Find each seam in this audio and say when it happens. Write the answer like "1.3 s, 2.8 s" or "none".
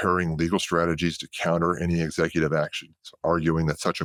none

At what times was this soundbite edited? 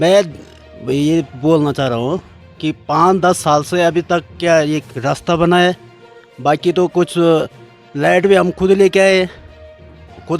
none

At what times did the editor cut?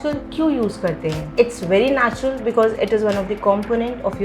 1.3 s

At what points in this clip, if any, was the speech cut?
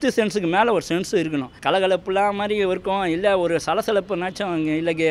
1.5 s

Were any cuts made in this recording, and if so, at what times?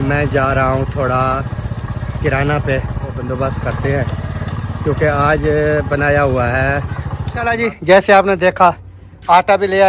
3.2 s, 7.3 s

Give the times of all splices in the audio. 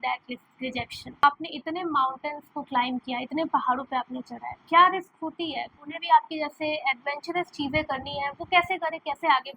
1.2 s, 5.8 s

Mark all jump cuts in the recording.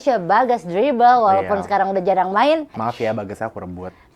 2.8 s

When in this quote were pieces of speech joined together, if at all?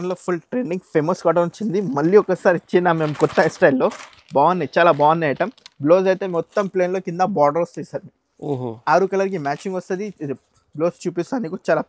none

